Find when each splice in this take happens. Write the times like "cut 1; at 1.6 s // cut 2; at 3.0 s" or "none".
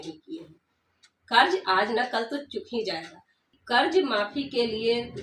cut 1; at 3.5 s